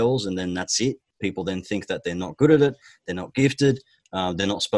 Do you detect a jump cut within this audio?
yes; 1 cut; at 1.1 s

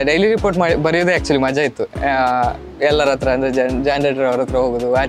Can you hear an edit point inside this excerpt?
no; 0 cuts

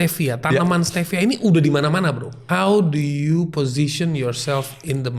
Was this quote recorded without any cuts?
no; 1 cut; at 2.3 s

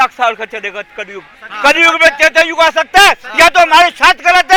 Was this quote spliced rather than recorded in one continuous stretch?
no; 0 cuts

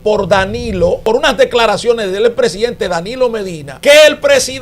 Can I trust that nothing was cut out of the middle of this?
no; 2 cuts; at 1.0 s, 3.6 s

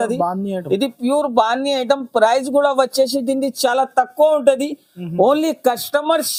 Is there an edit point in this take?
no; 0 cuts

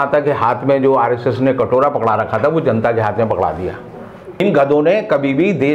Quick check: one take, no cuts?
no; 1 cut; at 4.4 s

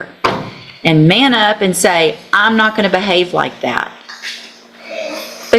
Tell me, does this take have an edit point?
no; 0 cuts

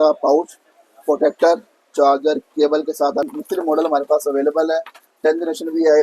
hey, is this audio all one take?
no; 1 cut; at 3.3 s

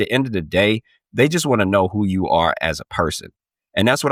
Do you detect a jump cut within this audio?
no; 0 cuts

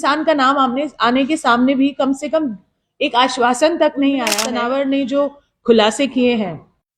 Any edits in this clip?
yes; 1 cut; at 4.4 s

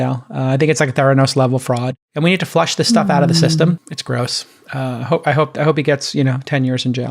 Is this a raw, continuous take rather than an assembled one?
no; 2 cuts; at 2.0 s, 3.9 s

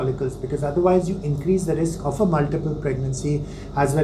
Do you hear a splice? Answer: no; 0 cuts

